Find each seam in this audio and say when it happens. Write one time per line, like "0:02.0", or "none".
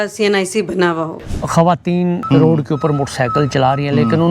0:01.2
0:02.2